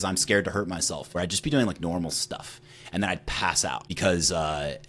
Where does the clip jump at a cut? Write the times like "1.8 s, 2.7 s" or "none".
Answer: 1.0 s, 3.9 s